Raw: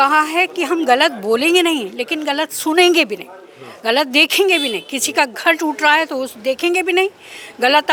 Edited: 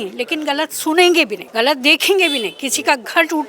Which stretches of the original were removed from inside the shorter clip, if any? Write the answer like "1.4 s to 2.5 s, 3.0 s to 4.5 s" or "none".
3.2 s to 3.7 s